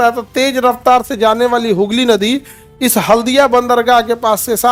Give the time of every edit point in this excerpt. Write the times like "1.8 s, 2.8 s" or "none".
none